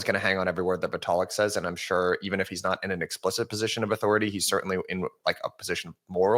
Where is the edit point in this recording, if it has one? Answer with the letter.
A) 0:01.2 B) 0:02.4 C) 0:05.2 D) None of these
D